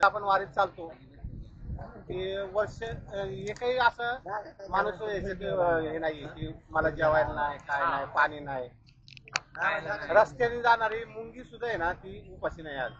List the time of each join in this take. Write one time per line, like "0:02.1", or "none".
none